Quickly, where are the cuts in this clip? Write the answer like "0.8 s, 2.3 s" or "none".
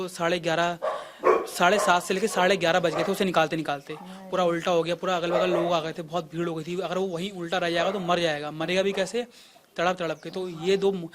none